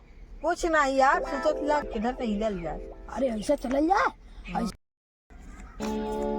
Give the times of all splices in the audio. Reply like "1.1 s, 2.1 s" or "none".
1.9 s, 4.7 s